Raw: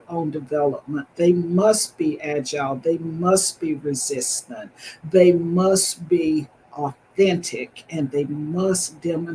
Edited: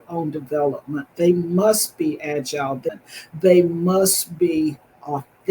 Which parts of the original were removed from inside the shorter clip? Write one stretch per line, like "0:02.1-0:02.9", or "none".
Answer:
0:02.9-0:04.6

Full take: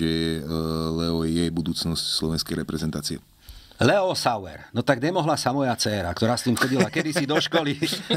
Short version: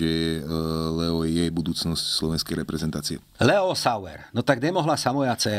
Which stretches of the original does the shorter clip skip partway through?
0:03.2-0:03.6

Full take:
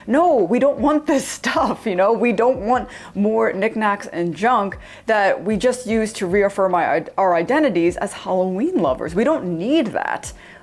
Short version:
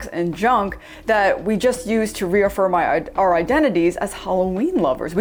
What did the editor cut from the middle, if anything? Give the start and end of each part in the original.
none

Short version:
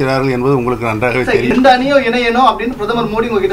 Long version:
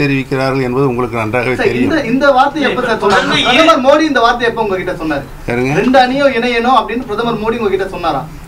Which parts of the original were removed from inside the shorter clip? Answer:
0:01.8-0:05.8

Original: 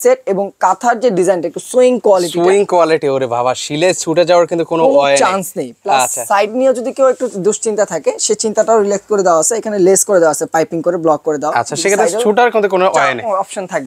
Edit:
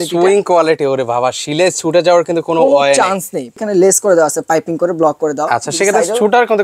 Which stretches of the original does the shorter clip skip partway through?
0:05.8-0:09.6

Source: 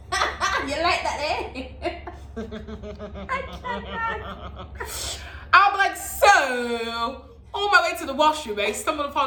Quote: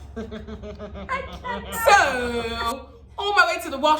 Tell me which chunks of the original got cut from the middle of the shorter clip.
0:03.9-0:06.1

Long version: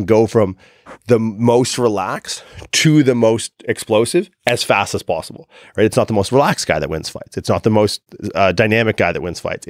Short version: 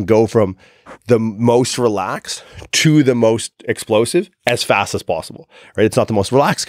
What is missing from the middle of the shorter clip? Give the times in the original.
none

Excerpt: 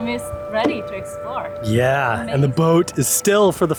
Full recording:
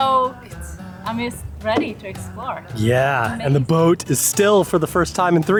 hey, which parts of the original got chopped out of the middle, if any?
none

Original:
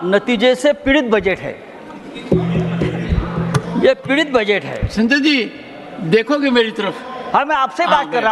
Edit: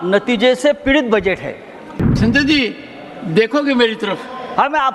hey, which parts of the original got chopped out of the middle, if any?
0:02.0-0:04.8

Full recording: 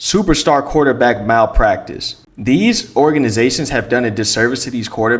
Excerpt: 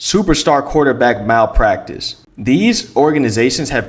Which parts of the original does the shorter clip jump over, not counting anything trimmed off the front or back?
none

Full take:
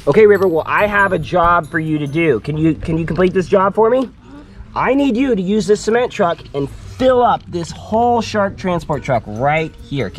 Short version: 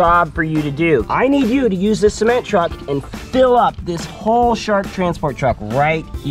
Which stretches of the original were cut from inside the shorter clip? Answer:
0:02.4-0:04.7

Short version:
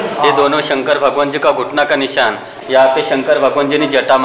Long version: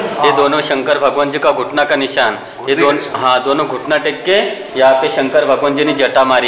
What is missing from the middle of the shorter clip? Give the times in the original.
0:02.5-0:04.6

